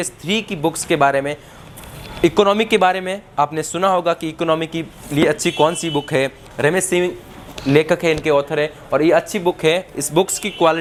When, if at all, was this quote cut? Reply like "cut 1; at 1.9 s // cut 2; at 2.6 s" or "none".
none